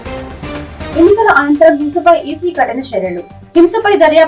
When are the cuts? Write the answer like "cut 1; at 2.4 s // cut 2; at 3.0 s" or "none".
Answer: none